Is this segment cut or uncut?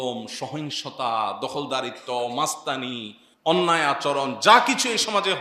uncut